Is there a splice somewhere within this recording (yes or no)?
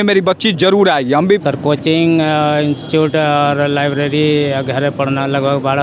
yes